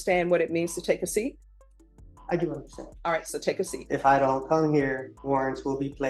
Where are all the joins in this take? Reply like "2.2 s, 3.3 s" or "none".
3.8 s, 5.1 s